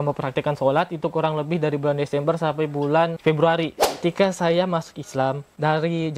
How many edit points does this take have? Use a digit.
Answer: 2